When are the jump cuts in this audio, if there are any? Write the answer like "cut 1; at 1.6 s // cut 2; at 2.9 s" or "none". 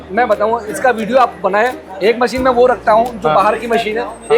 none